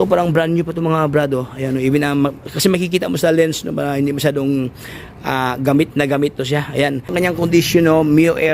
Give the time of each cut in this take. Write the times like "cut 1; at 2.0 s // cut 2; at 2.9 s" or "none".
cut 1; at 7.1 s